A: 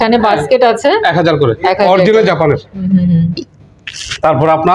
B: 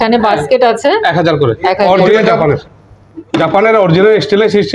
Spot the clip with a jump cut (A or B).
B